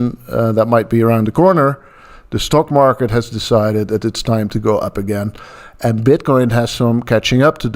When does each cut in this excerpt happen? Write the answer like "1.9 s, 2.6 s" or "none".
none